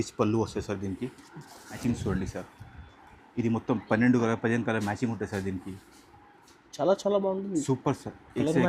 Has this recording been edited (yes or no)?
yes